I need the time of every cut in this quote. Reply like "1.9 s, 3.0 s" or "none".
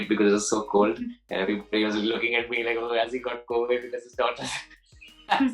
none